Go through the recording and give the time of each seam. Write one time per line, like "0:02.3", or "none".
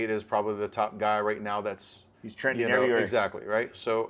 none